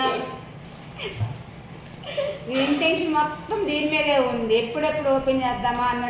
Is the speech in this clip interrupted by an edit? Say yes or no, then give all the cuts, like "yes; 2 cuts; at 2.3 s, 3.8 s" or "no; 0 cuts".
no; 0 cuts